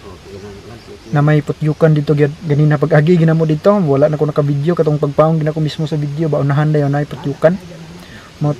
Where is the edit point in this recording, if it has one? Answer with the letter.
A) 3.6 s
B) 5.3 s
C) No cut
C